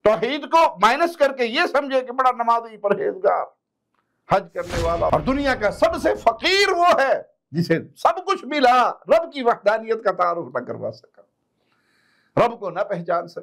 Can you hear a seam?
yes; 1 cut; at 5.1 s

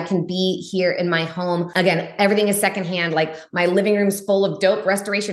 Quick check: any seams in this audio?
yes; 1 cut; at 1.7 s

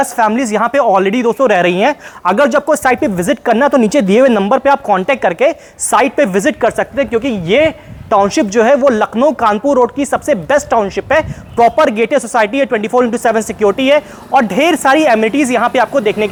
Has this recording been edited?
no; 0 cuts

